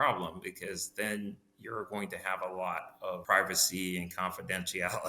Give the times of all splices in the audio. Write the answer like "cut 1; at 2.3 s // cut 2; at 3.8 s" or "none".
cut 1; at 3.2 s

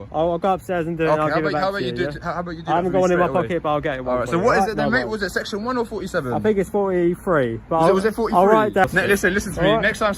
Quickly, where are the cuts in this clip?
cut 1; at 8.8 s

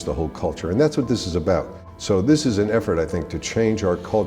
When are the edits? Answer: cut 1; at 1.8 s

